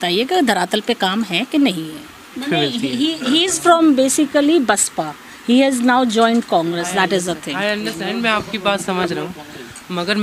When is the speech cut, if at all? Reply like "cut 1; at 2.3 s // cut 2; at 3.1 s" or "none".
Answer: cut 1; at 2.4 s